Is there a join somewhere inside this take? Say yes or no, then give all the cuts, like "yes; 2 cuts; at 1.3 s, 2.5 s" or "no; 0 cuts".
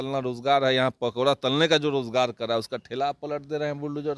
no; 0 cuts